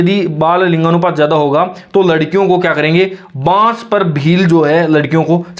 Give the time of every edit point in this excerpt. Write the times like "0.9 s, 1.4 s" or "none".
none